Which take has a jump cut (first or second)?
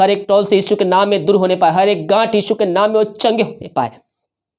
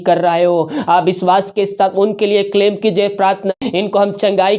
second